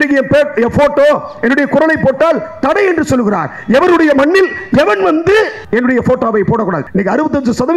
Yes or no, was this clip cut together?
yes